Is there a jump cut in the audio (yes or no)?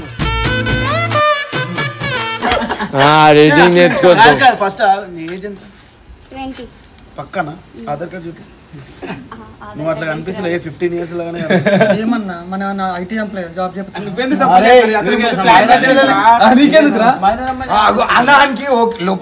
no